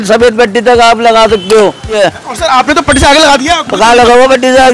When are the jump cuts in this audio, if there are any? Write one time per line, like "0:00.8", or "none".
0:01.9